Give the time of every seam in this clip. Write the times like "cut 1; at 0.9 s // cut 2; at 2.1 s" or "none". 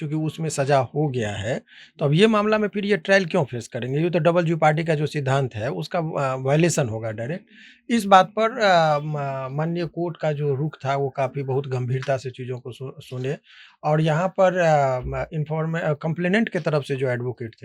none